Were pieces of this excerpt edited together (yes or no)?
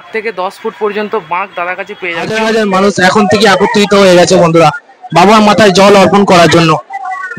yes